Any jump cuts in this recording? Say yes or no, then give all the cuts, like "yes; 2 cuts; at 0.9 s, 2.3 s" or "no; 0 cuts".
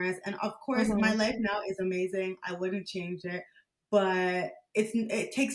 no; 0 cuts